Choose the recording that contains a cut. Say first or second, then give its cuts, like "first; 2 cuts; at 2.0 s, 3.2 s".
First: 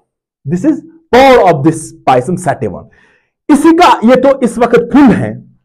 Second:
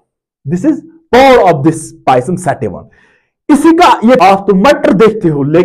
second; 1 cut; at 4.2 s